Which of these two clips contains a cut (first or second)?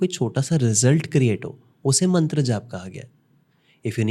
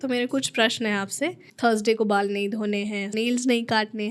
second